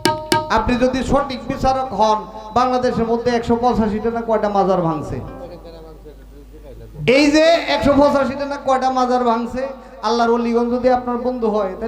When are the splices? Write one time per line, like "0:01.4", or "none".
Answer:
none